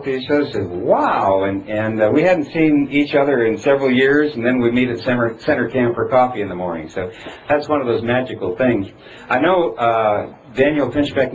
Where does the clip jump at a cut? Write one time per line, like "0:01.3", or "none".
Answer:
none